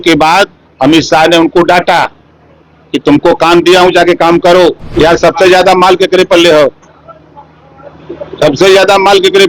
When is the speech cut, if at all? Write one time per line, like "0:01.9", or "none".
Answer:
0:04.9